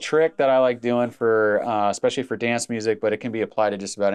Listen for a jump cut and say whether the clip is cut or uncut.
uncut